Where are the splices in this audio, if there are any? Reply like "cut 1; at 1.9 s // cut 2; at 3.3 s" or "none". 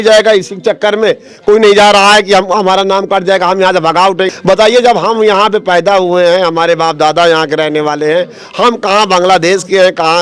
none